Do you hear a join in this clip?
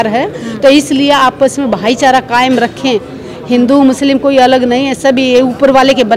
no; 0 cuts

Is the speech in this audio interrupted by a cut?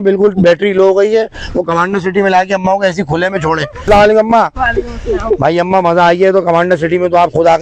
yes; 1 cut; at 3.8 s

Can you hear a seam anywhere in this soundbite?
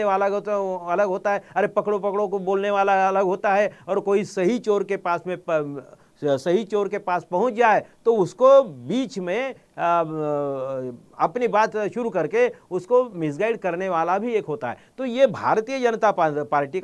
no; 0 cuts

